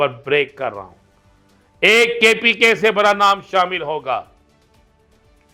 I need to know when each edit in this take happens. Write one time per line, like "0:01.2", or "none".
none